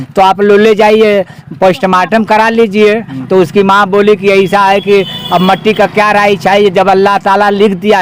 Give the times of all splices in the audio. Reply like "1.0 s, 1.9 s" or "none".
none